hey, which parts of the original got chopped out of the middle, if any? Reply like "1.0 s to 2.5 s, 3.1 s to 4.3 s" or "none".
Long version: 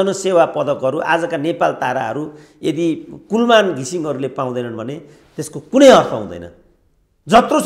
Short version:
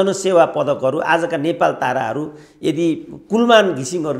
none